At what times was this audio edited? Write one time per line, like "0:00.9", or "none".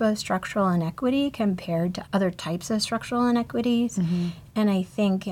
0:02.0